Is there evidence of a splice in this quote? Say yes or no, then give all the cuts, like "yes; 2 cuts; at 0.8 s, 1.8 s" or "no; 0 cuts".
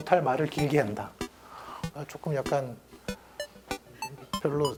no; 0 cuts